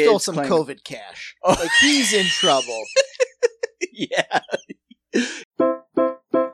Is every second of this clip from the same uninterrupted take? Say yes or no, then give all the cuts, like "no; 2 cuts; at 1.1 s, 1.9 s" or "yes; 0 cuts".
no; 1 cut; at 5.5 s